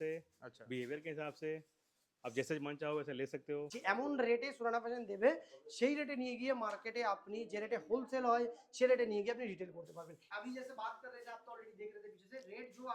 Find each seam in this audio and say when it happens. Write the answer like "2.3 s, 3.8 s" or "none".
3.7 s, 10.1 s